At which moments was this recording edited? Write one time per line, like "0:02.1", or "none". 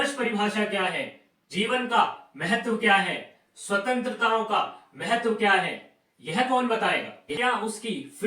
0:07.2